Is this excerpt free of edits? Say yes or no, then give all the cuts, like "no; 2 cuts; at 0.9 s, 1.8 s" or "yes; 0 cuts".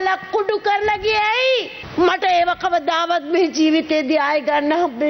no; 1 cut; at 1.8 s